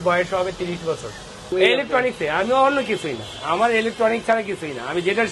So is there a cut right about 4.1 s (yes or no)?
no